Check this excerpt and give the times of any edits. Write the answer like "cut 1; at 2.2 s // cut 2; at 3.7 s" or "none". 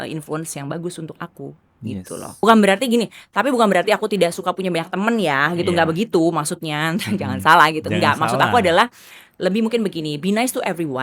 cut 1; at 2.4 s